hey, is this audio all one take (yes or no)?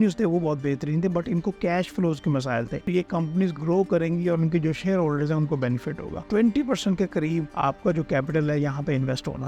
no